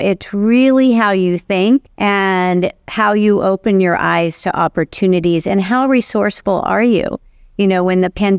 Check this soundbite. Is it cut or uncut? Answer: cut